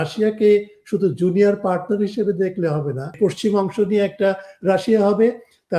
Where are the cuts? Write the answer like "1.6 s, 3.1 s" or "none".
3.1 s

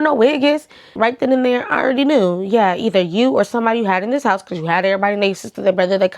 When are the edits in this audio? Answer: 0.9 s

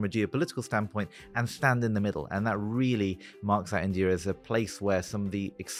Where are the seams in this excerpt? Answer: none

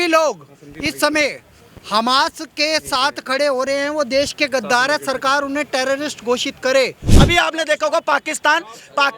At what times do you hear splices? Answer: 7.0 s

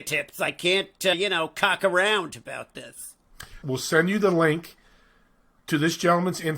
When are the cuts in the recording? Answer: 1.1 s, 3.5 s

